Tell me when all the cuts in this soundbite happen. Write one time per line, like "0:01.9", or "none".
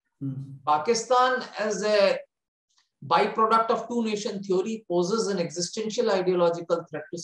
none